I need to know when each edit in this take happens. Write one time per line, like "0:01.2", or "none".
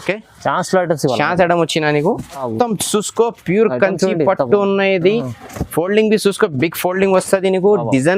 0:02.5